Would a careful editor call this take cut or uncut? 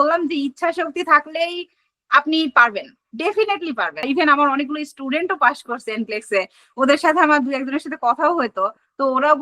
cut